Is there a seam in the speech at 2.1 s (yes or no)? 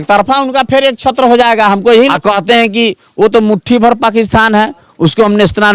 yes